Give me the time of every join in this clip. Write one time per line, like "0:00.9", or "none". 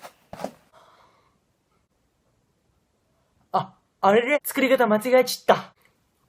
none